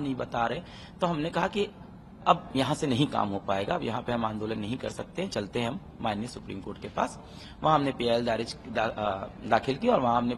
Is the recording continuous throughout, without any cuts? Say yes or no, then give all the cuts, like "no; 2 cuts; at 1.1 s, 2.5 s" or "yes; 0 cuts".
yes; 0 cuts